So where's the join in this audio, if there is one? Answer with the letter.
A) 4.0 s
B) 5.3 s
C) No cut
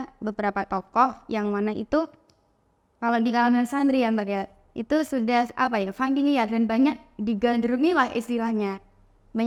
C